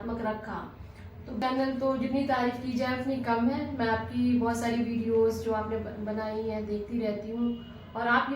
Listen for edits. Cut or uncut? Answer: cut